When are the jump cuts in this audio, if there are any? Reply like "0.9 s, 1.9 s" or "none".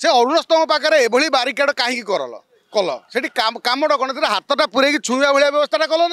none